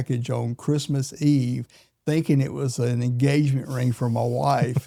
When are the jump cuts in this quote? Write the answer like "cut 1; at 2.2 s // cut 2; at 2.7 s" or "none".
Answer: none